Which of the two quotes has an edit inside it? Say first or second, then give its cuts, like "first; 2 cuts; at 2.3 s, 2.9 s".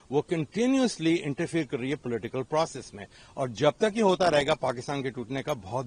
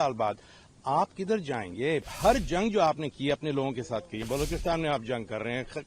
second; 2 cuts; at 2.1 s, 4.2 s